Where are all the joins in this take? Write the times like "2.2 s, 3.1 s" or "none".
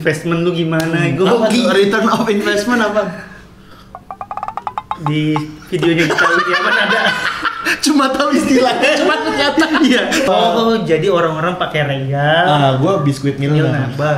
10.3 s